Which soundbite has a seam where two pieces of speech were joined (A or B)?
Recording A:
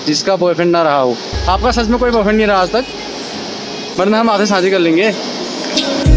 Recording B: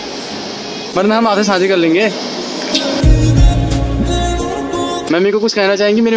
B